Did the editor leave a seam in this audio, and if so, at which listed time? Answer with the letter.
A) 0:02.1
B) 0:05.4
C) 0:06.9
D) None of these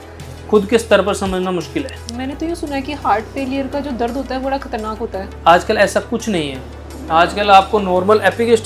A